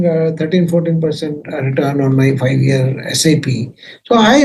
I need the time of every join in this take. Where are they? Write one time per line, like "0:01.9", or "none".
none